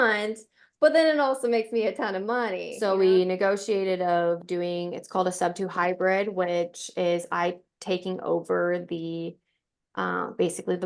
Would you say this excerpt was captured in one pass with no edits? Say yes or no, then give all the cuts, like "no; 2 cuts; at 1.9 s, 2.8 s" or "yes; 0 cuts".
no; 1 cut; at 2.7 s